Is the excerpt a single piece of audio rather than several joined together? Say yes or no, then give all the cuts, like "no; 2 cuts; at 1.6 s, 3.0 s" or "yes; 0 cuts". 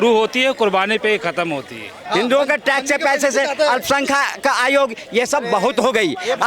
no; 1 cut; at 2.0 s